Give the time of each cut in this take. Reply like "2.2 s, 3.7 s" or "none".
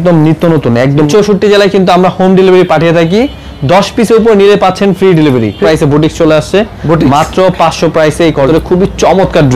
1.1 s, 5.6 s, 8.5 s